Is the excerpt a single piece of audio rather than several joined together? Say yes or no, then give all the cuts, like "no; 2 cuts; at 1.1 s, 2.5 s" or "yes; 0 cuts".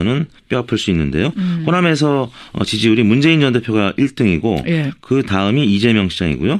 yes; 0 cuts